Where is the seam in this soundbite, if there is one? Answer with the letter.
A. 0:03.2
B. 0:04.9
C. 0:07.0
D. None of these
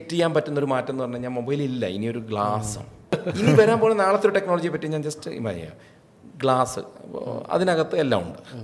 A